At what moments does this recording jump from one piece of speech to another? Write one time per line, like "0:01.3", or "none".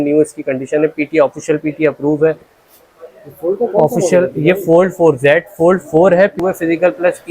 0:02.5
0:06.4